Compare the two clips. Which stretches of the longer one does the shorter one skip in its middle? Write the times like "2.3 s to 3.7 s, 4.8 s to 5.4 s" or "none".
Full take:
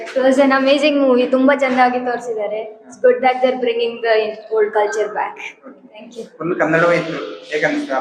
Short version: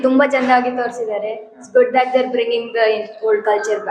none